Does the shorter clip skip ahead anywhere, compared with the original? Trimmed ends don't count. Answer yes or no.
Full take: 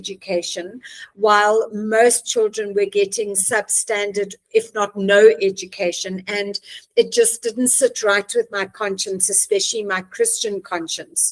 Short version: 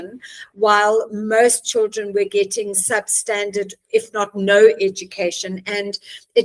no